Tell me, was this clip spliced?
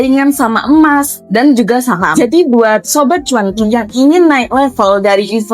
yes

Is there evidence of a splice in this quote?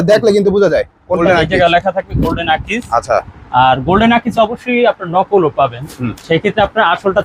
yes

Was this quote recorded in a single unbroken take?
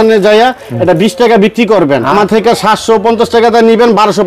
no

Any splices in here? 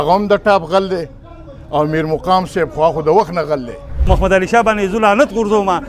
yes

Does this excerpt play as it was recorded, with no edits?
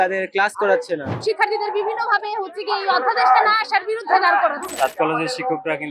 no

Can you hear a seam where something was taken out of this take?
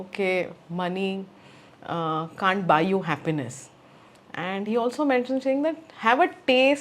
no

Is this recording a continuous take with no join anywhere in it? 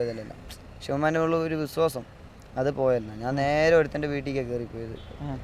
yes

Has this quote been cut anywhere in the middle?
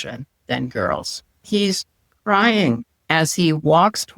yes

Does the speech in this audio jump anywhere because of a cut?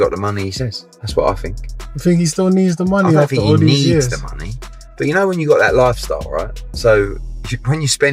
no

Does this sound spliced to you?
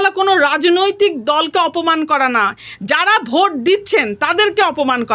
no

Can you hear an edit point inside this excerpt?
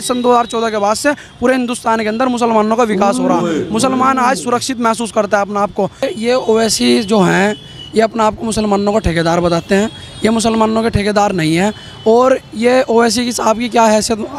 yes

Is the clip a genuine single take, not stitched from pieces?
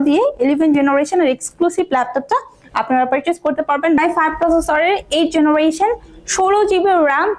no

